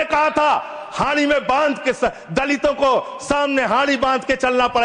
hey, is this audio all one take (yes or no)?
yes